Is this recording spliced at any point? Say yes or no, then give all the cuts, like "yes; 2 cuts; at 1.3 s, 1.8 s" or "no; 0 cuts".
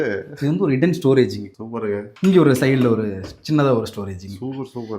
yes; 1 cut; at 2.1 s